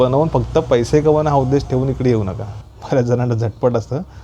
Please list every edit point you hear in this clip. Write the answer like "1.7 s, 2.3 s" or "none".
2.6 s